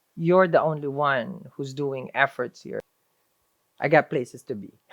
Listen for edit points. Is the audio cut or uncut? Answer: cut